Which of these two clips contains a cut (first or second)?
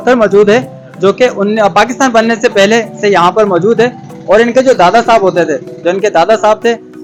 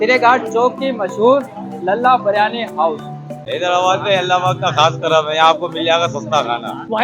second